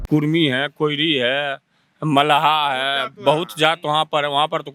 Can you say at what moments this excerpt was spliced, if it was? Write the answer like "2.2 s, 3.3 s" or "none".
none